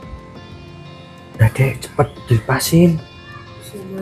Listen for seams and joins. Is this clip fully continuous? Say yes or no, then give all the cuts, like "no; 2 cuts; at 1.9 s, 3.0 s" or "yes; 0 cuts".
no; 1 cut; at 1.4 s